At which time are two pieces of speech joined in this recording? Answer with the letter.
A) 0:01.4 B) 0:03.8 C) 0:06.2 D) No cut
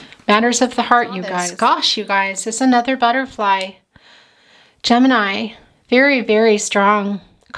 A